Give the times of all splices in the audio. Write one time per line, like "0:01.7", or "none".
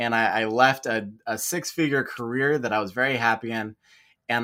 none